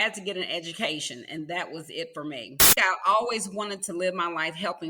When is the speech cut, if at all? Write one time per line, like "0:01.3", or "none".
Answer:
0:02.7